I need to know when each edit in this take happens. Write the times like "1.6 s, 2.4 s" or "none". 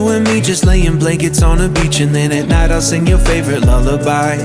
none

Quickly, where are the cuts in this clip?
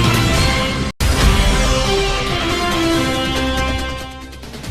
none

